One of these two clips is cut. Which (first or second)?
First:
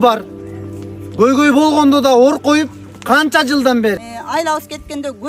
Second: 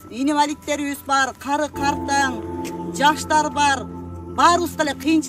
first